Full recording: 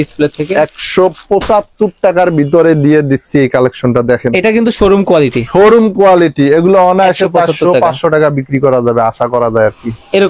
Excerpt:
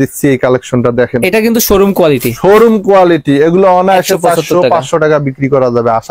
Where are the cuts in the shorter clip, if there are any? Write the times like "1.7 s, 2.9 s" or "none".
none